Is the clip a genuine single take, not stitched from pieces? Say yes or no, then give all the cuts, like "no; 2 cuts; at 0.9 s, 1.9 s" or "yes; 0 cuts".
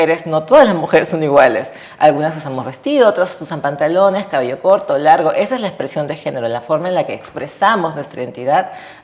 yes; 0 cuts